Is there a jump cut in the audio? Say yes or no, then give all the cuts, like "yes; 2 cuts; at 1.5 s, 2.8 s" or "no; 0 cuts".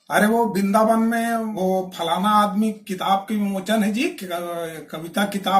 yes; 1 cut; at 1.5 s